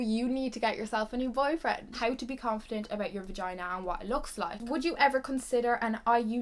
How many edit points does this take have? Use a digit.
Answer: 2